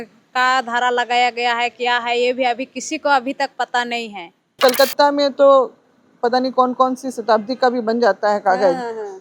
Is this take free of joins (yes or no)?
no